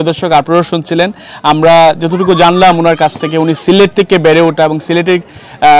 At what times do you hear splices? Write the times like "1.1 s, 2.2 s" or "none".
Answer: none